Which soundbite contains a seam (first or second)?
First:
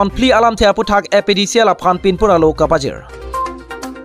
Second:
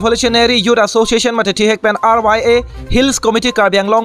first